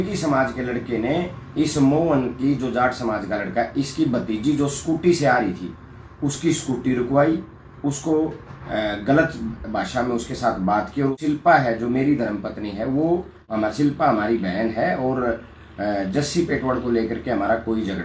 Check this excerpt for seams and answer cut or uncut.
cut